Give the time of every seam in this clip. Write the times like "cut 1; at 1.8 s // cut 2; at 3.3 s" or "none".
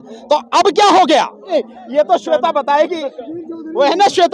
cut 1; at 1.5 s